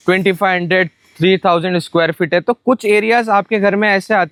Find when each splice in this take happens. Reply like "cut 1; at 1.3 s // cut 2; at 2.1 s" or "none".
none